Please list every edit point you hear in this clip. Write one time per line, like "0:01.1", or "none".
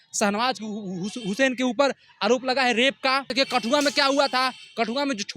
0:03.3